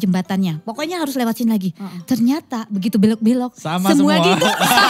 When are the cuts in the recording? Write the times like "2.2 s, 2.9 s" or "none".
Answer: none